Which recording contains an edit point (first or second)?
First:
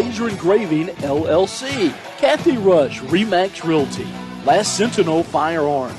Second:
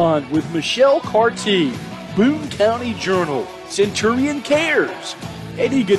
first